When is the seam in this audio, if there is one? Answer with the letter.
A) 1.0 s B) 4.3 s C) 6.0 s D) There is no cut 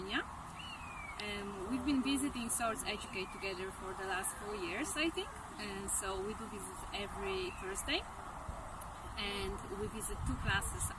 D